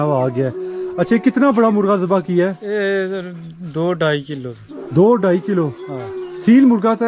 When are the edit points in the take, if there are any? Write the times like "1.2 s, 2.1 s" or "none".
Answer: none